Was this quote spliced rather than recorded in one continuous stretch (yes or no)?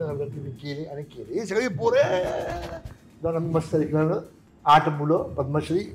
no